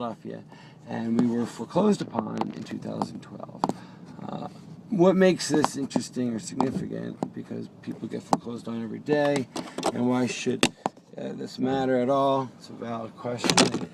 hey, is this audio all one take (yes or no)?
no